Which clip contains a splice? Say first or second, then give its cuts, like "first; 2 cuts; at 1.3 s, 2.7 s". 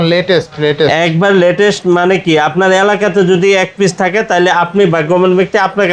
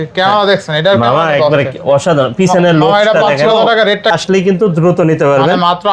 second; 1 cut; at 4.2 s